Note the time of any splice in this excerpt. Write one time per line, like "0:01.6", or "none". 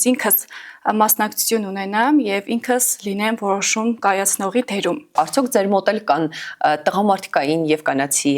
0:05.1